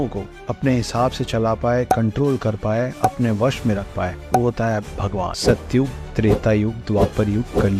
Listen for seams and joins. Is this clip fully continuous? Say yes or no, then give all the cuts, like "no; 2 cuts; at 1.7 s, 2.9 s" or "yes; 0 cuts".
no; 1 cut; at 5.4 s